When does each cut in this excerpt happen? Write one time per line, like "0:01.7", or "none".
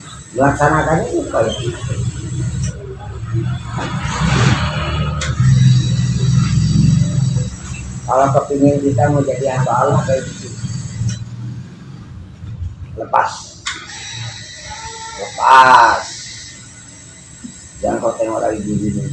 none